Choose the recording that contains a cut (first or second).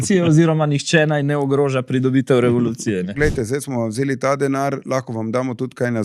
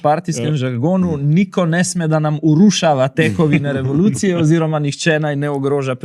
first